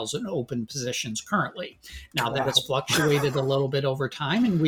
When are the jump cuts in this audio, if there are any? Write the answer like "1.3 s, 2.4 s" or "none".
none